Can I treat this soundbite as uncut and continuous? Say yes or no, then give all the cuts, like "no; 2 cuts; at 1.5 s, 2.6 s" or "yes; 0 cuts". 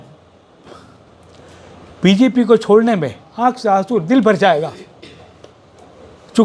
yes; 0 cuts